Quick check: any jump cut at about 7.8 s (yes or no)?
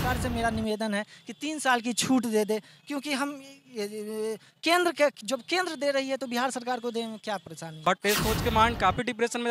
yes